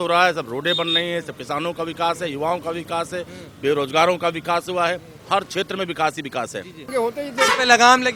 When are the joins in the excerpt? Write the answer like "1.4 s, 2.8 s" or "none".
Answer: 6.8 s

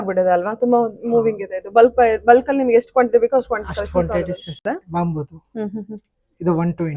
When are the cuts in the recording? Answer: 4.6 s

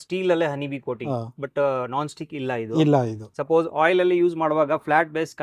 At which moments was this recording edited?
1.0 s, 3.3 s

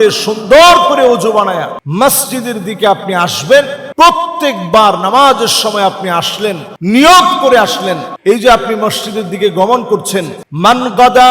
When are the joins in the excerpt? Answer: 1.8 s, 3.8 s, 6.7 s, 8.1 s, 10.4 s

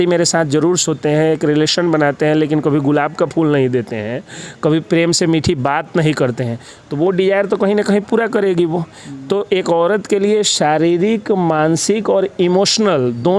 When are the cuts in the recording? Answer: none

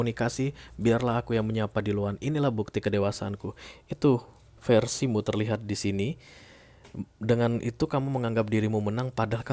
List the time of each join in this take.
none

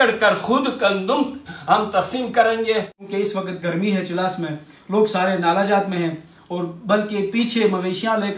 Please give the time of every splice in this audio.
3.0 s

